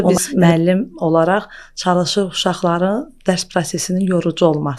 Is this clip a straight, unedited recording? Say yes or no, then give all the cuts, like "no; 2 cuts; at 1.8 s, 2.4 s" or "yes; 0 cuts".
yes; 0 cuts